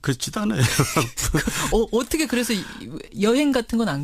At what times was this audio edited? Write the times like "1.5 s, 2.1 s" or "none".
2.3 s